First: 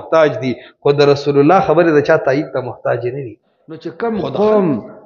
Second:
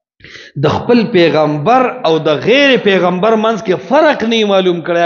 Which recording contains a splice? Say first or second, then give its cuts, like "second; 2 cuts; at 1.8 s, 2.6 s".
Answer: first; 1 cut; at 3.9 s